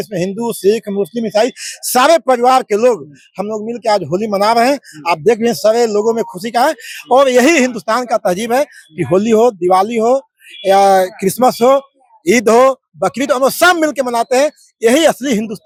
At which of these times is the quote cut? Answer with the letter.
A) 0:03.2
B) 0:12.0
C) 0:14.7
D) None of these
D